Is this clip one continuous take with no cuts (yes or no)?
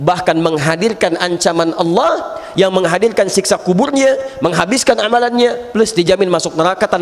yes